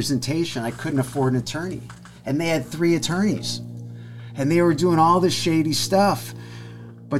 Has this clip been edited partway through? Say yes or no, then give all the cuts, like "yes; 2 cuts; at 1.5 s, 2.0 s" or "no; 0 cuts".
no; 0 cuts